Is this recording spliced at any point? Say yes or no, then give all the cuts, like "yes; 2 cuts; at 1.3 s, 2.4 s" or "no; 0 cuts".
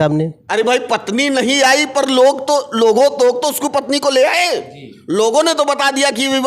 no; 0 cuts